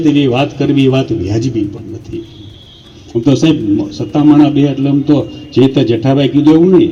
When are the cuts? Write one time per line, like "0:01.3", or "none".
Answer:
none